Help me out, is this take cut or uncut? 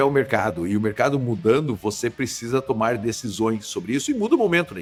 uncut